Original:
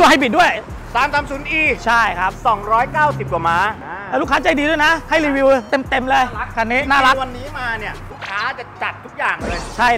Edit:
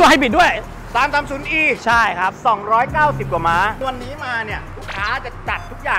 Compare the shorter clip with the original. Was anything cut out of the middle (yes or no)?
yes